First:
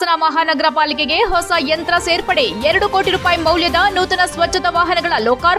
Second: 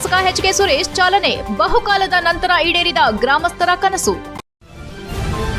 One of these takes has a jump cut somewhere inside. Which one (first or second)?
second